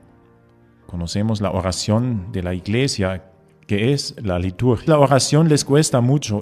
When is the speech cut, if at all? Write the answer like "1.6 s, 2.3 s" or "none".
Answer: none